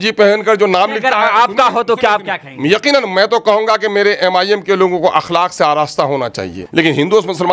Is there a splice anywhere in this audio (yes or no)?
yes